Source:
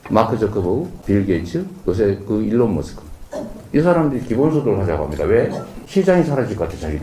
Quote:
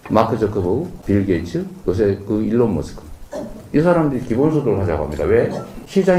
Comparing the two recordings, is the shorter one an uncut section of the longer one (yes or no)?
yes